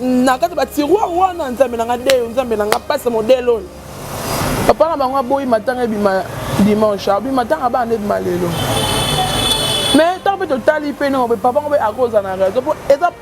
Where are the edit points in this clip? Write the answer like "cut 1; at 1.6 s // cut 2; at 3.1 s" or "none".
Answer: cut 1; at 4.4 s